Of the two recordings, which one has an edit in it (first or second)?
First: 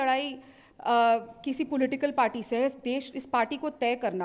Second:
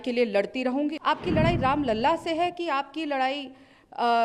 second